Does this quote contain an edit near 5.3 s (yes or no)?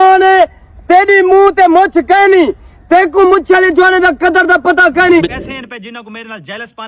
yes